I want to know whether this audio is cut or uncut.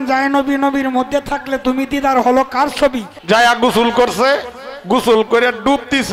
cut